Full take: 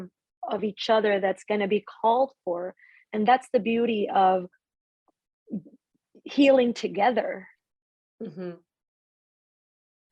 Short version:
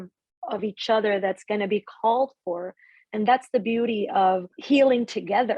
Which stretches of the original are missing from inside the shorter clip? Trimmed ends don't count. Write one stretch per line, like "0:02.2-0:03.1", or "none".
0:04.5-0:06.2